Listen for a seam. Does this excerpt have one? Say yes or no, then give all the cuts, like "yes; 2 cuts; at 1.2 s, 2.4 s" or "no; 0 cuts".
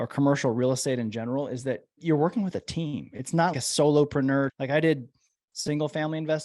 yes; 3 cuts; at 2.0 s, 3.5 s, 4.5 s